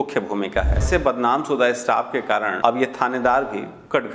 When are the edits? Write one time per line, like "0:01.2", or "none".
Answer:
0:00.8
0:02.5